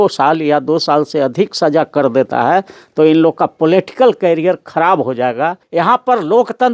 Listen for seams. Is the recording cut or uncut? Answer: cut